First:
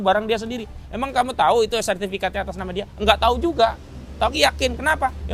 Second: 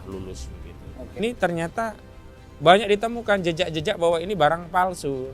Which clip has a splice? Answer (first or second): second